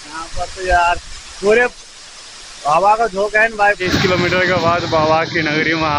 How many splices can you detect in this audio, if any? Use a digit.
1